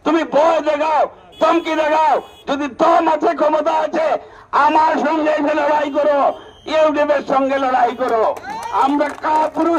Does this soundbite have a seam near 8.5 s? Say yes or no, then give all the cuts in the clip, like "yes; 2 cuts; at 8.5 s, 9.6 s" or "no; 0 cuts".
yes; 1 cut; at 8.5 s